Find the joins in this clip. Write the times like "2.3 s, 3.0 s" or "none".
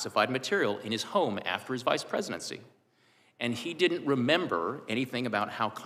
none